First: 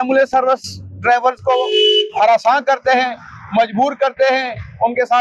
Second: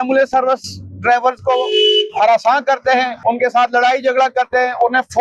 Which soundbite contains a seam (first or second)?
second